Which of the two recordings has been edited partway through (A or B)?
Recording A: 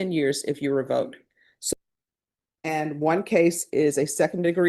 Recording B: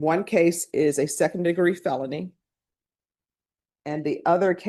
A